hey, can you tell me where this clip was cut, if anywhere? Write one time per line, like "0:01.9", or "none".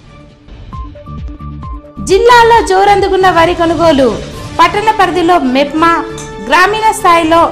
none